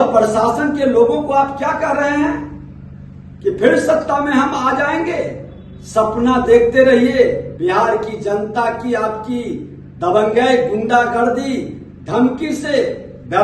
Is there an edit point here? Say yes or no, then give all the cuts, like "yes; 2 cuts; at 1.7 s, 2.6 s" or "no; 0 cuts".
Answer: yes; 1 cut; at 7.5 s